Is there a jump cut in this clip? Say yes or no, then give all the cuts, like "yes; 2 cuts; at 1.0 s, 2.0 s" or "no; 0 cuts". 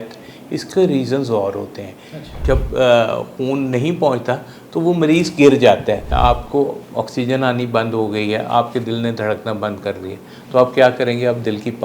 yes; 2 cuts; at 2.3 s, 6.1 s